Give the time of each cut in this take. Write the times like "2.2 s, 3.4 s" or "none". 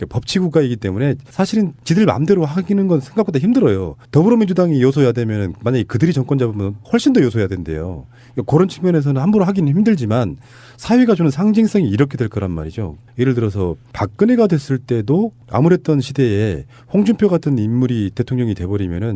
17.2 s